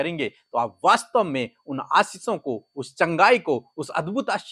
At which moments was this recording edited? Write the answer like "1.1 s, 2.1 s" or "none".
none